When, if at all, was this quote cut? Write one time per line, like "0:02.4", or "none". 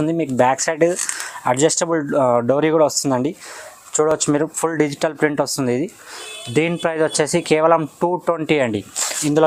none